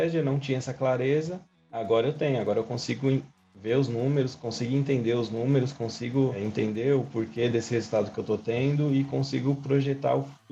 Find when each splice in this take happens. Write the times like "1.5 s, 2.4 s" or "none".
none